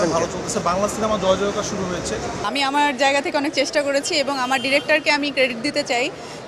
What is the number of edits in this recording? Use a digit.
1